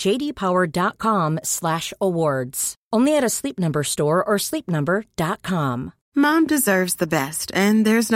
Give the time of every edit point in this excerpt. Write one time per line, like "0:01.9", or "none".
0:05.9